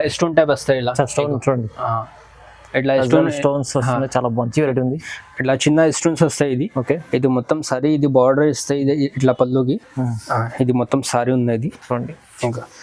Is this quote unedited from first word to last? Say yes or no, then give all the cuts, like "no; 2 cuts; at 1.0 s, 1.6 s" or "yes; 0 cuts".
yes; 0 cuts